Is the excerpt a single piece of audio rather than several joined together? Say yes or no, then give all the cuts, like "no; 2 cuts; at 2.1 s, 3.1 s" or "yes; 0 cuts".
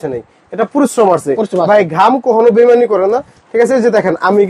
yes; 0 cuts